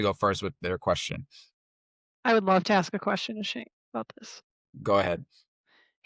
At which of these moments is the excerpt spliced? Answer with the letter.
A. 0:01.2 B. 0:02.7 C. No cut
C